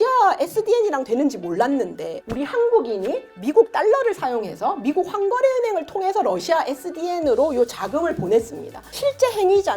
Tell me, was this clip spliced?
yes; 2 cuts; at 2.2 s, 8.9 s

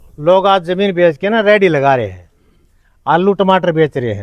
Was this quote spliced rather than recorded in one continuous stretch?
no; 0 cuts

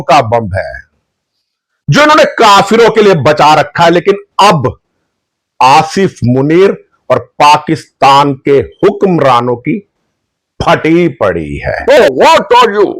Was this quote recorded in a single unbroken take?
no; 1 cut; at 12.0 s

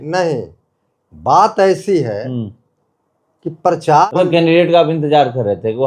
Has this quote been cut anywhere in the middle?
yes; 1 cut; at 4.1 s

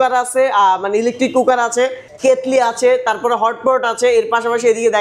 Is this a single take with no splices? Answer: no; 1 cut; at 2.1 s

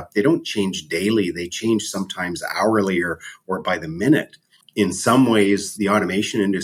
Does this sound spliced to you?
yes; 1 cut; at 4.6 s

